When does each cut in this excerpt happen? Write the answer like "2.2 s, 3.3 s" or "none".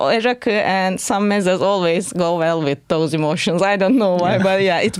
none